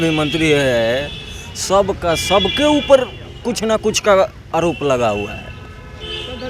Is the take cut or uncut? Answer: uncut